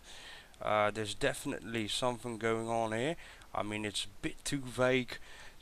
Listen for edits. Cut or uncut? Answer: uncut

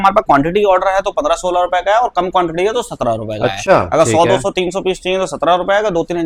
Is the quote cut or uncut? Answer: uncut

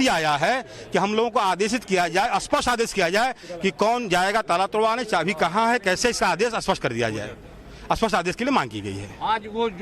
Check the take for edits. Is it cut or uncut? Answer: cut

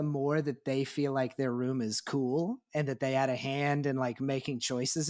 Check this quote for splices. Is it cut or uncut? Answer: uncut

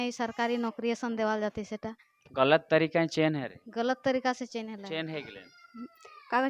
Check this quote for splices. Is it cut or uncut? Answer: cut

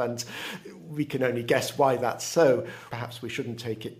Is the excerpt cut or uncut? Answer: cut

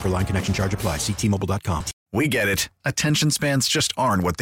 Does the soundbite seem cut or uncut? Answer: cut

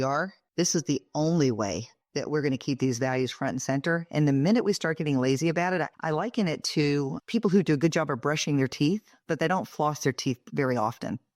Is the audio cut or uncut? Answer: cut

